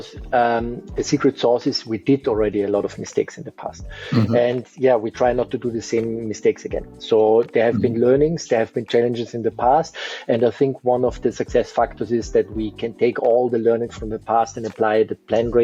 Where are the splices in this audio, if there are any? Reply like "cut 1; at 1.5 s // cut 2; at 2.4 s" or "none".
none